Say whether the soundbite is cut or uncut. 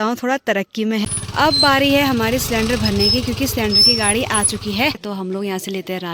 cut